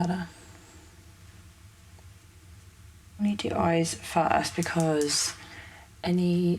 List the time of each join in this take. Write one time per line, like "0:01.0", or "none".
0:03.2

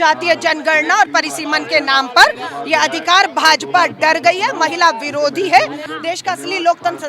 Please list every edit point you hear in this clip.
0:05.8

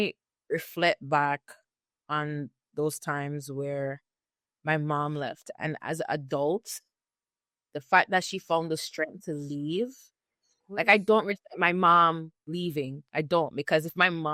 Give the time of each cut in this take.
none

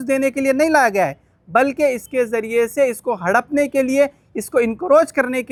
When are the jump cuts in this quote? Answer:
none

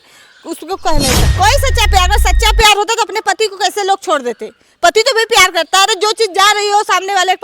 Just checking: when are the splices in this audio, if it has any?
0:01.3

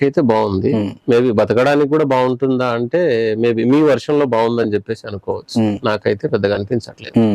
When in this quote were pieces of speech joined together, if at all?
none

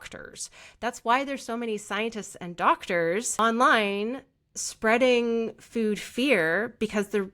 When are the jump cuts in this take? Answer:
0:03.4

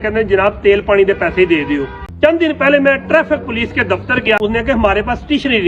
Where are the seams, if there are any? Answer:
0:02.0
0:04.4

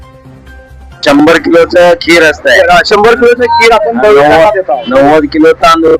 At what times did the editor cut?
0:01.0

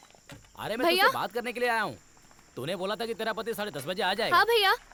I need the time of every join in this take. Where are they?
none

